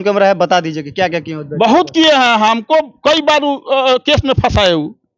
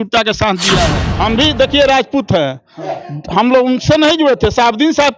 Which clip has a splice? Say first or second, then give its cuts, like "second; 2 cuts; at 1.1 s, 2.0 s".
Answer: second; 1 cut; at 1.0 s